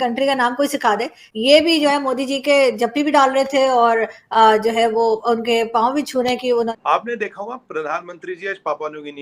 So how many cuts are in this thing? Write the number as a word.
one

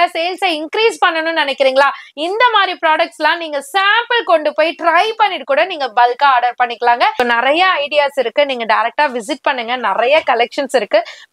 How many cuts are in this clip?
one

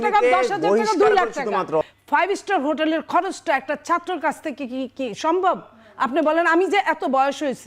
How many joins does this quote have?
one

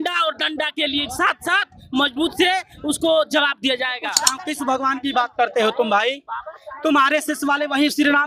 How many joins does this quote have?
one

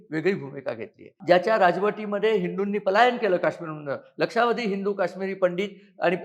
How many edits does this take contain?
one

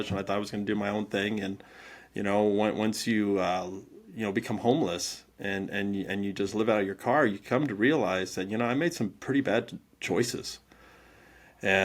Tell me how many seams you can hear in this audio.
zero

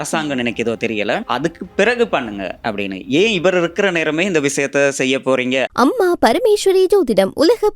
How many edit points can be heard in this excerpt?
two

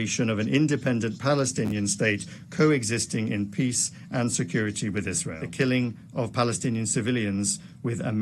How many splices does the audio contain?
one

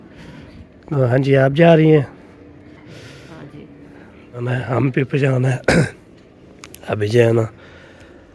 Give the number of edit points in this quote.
one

